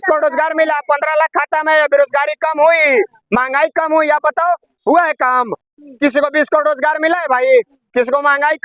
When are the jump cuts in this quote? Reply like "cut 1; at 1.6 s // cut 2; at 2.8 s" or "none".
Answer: none